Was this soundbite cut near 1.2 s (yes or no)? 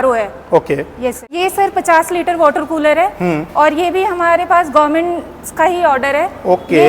yes